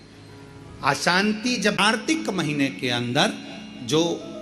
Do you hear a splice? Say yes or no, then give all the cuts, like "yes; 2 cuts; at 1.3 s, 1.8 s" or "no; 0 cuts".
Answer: yes; 1 cut; at 1.9 s